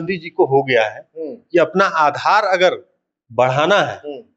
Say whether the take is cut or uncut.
uncut